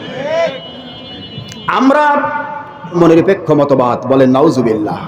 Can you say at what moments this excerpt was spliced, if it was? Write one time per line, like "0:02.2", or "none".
0:03.0